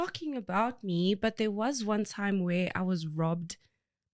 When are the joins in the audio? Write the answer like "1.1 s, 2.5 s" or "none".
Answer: none